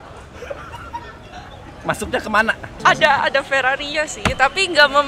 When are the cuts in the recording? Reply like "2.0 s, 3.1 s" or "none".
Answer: 2.7 s